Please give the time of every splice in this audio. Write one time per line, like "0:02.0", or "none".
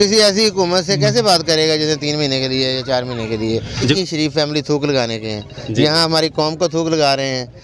0:03.9